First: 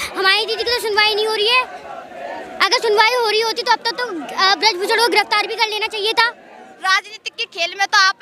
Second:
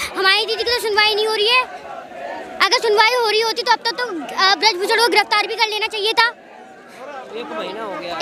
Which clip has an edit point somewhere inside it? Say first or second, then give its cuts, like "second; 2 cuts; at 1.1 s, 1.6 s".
first; 1 cut; at 6.7 s